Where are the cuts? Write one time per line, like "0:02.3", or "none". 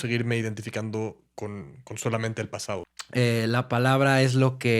0:02.9

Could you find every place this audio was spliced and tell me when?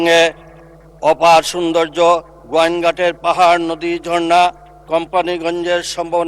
none

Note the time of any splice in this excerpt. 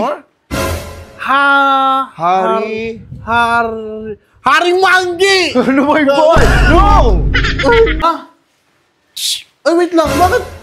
0:08.0

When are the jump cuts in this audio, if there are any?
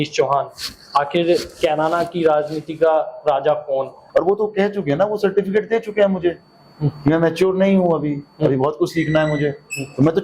0:04.0

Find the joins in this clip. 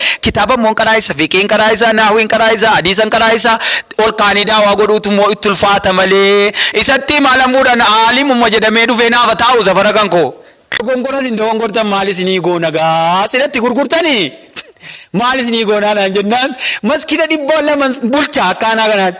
0:10.8

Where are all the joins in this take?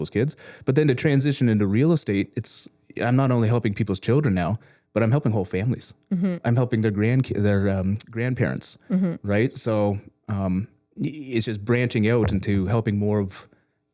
none

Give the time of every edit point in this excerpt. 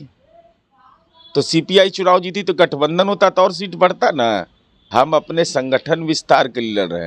0:04.8

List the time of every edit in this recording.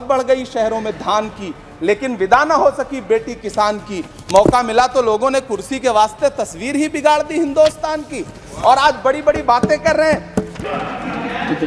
0:10.4

